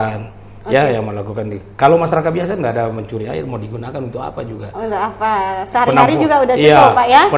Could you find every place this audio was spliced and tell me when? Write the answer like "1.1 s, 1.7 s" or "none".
none